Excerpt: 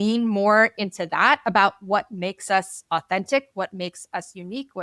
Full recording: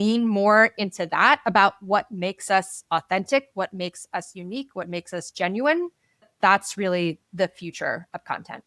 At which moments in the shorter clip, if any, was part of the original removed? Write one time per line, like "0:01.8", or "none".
none